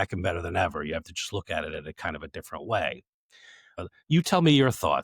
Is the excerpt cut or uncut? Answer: cut